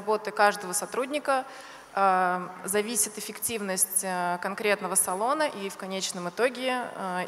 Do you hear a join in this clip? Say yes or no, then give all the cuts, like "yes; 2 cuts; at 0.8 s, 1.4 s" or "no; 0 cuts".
no; 0 cuts